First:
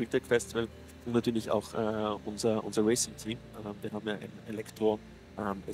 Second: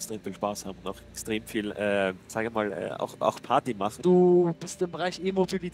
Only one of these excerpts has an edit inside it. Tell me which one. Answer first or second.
second